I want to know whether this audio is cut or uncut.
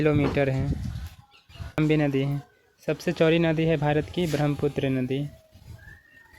cut